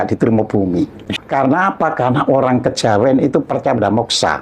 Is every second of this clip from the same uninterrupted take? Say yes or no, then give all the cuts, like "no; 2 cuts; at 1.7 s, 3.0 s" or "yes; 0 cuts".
no; 1 cut; at 1.1 s